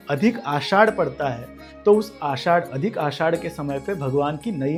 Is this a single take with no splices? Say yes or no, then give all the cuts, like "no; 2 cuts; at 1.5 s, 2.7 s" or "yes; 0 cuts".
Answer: yes; 0 cuts